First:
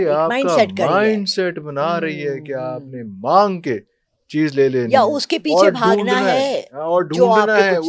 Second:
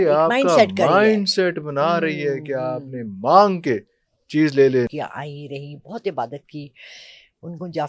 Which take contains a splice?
second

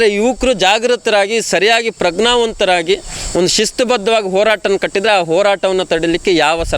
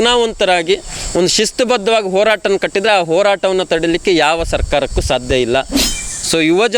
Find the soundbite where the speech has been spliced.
second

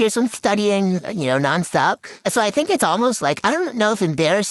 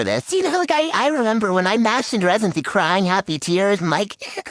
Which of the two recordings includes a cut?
first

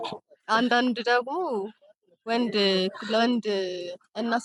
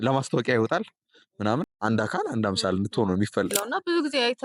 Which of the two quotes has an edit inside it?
second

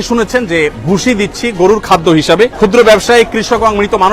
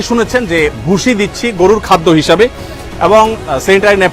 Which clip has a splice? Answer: first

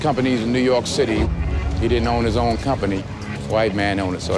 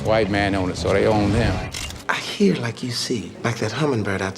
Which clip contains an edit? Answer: second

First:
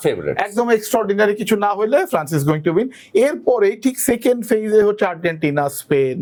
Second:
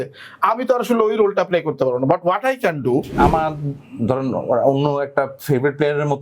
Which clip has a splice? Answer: second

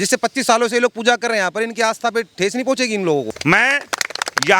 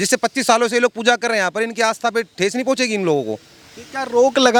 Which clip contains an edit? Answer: first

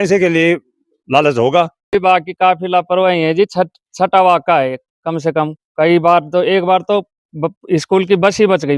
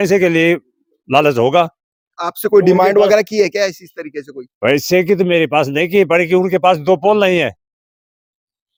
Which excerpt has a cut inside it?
first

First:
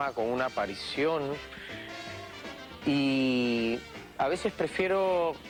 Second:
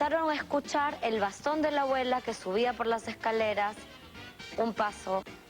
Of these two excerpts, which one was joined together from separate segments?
second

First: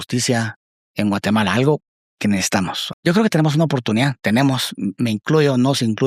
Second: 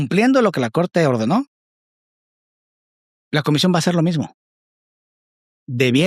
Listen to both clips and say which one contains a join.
first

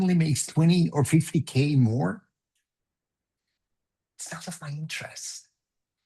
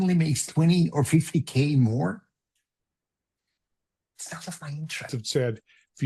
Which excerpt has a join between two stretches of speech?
second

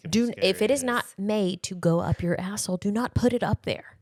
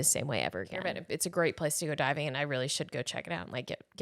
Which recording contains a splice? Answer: second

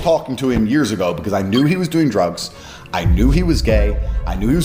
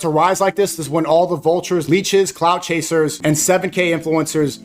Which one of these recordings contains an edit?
second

